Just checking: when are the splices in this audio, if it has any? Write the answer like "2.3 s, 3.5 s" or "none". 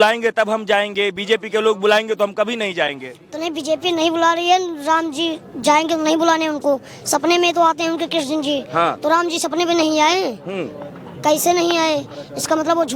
none